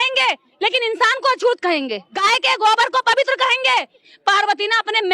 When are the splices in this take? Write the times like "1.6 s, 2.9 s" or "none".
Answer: 2.2 s, 4.1 s